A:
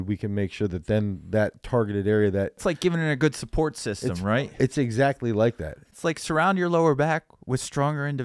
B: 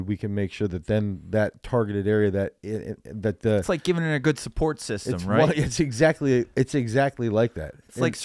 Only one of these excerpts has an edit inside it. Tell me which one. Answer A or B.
A